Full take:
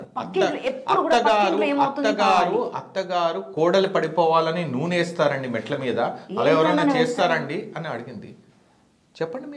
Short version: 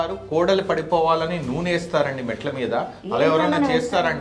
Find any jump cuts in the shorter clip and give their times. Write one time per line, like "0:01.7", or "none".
none